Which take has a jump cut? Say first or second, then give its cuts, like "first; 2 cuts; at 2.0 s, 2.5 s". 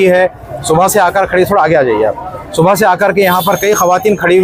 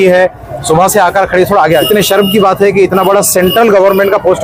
second; 1 cut; at 1.8 s